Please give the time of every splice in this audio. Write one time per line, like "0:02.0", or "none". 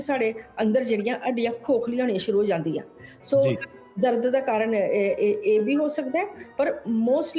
none